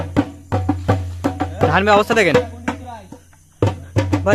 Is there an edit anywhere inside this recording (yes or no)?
no